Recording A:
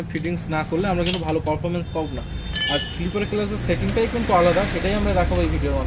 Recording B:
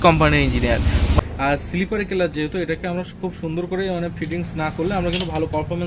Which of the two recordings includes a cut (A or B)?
B